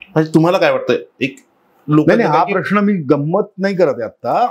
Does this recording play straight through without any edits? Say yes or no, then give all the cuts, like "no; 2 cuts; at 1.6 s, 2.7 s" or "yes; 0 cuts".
yes; 0 cuts